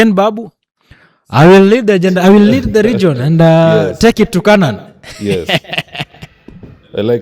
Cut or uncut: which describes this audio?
uncut